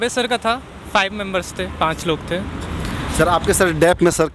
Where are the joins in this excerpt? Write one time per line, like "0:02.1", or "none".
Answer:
none